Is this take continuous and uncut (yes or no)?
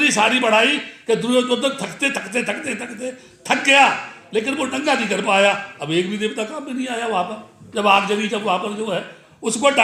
yes